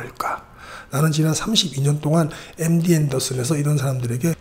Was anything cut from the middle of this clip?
no; 0 cuts

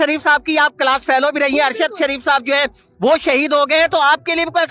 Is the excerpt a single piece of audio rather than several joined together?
yes; 0 cuts

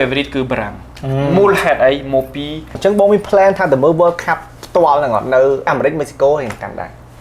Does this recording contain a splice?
yes; 2 cuts; at 2.8 s, 5.7 s

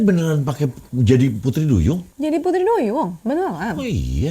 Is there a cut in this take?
yes; 1 cut; at 2.1 s

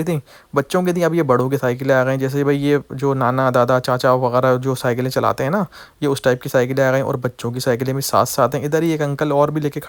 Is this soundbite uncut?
yes; 0 cuts

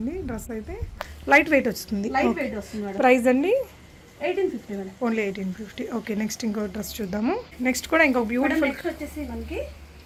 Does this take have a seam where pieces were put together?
no; 0 cuts

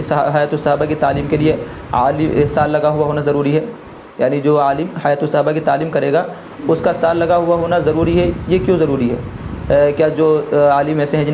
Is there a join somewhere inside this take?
no; 0 cuts

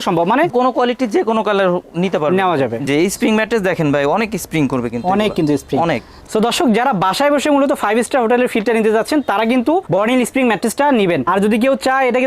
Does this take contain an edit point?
yes; 3 cuts; at 2.9 s, 6.2 s, 11.2 s

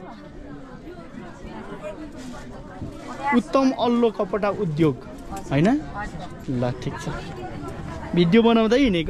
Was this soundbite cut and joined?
no; 0 cuts

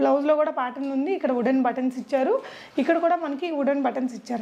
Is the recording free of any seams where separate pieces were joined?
yes; 0 cuts

